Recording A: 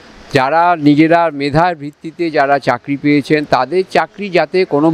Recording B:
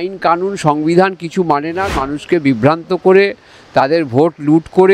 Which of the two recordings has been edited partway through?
B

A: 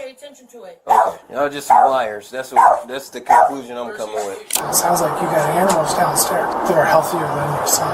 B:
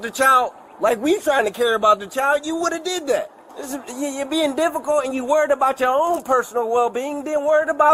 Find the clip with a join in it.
A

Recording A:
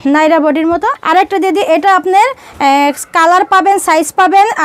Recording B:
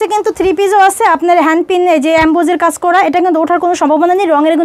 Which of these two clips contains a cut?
A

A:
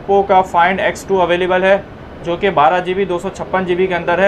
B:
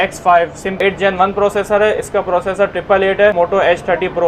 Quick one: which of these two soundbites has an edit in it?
B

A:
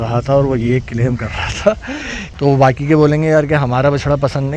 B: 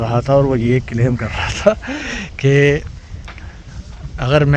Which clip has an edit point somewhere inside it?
A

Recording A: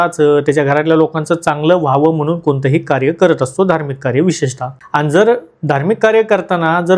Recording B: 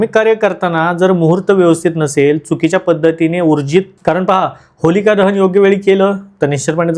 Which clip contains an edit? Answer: B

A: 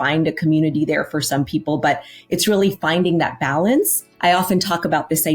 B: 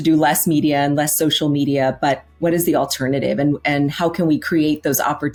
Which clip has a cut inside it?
A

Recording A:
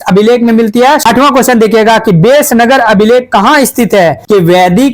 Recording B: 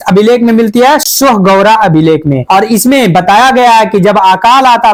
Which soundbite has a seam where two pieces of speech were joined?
A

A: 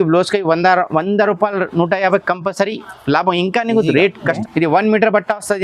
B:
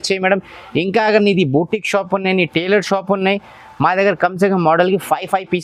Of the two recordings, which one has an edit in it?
A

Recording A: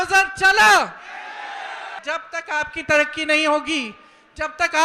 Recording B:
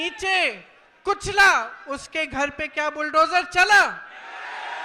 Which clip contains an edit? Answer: A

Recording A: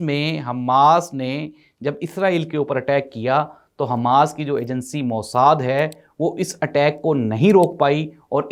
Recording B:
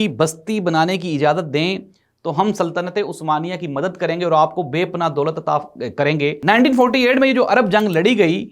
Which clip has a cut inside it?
B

